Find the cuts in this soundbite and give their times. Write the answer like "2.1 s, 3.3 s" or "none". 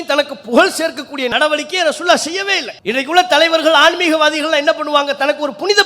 1.3 s, 2.7 s